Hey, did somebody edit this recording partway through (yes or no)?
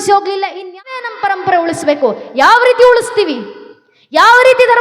yes